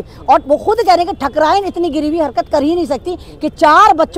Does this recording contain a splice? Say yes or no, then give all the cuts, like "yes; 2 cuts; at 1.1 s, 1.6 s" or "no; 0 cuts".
no; 0 cuts